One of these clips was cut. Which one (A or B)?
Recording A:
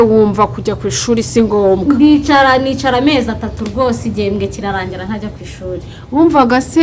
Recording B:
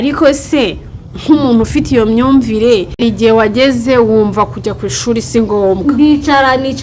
B